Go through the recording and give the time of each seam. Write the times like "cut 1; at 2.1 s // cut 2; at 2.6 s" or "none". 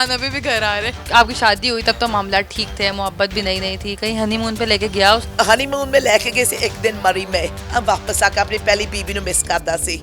cut 1; at 1.0 s // cut 2; at 5.3 s